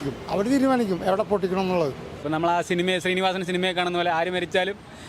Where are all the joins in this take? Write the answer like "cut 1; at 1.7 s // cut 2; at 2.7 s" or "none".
cut 1; at 2.1 s

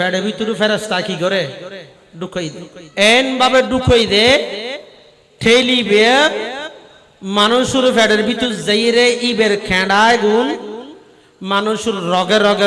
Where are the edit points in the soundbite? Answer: cut 1; at 2.8 s

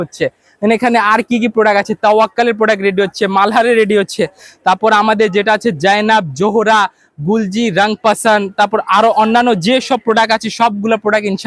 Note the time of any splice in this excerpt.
none

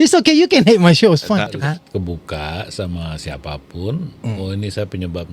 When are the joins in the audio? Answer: cut 1; at 1.5 s

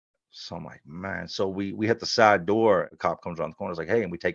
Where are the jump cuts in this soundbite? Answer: cut 1; at 2.9 s

